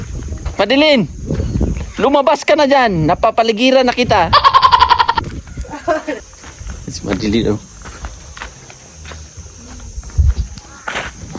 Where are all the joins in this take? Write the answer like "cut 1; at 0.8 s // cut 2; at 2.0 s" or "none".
cut 1; at 6.3 s